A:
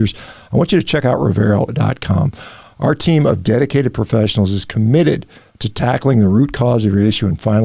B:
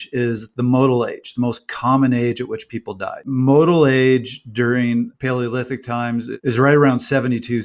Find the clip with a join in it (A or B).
B